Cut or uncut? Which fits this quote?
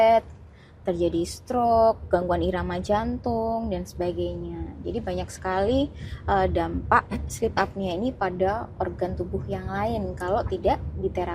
uncut